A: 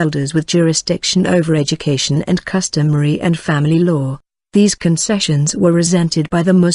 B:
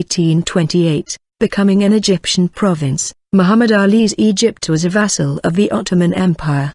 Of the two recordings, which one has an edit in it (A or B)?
A